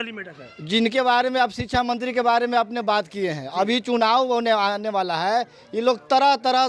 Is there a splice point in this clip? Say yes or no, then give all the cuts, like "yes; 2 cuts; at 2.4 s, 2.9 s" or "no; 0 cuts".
no; 0 cuts